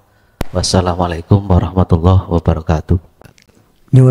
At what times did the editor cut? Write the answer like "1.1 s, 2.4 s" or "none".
3.2 s